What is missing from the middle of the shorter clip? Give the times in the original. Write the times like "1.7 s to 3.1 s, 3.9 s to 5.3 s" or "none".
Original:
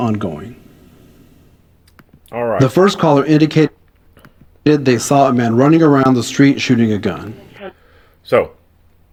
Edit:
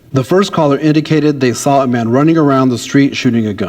3.7 s to 4.7 s